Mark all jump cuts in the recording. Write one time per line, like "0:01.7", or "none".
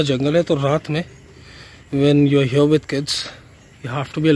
none